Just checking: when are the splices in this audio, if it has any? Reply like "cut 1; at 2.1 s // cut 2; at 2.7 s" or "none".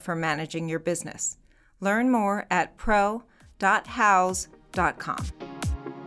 cut 1; at 5.1 s

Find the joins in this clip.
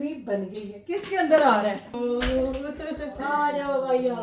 cut 1; at 2.0 s

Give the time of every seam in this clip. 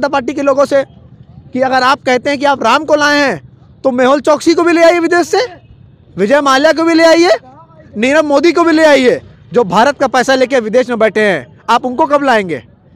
none

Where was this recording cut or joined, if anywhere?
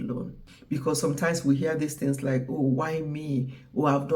cut 1; at 1.0 s

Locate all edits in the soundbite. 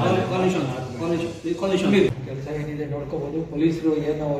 cut 1; at 2.3 s

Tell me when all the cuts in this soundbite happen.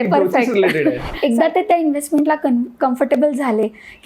cut 1; at 1.1 s

